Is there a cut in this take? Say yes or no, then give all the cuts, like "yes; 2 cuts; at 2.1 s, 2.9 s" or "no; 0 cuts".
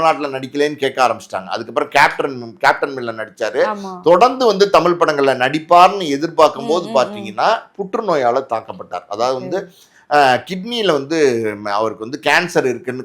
no; 0 cuts